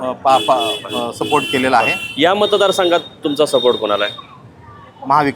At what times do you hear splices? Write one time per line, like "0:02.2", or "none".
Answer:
none